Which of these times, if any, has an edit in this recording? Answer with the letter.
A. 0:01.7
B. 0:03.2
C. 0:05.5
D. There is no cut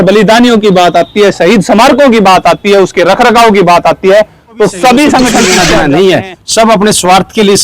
C